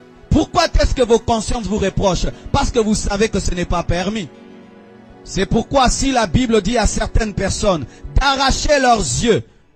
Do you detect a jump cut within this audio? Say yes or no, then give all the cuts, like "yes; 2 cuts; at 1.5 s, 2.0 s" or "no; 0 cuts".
no; 0 cuts